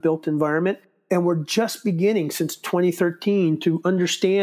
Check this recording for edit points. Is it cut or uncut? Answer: uncut